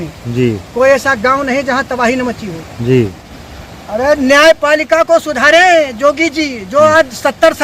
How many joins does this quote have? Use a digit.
1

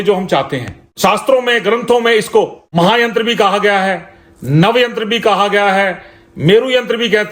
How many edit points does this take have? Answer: 2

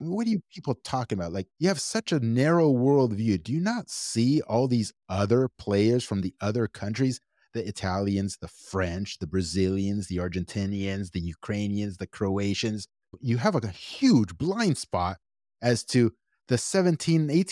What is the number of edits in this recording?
0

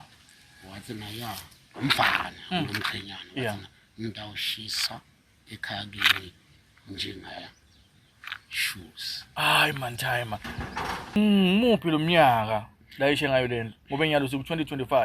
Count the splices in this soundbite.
1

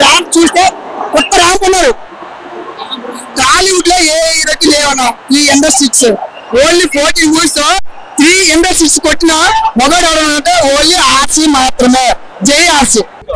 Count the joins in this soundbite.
1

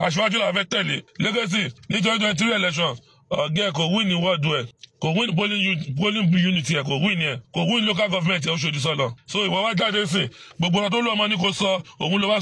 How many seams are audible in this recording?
5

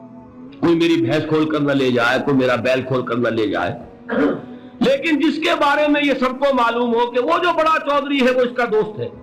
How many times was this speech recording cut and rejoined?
0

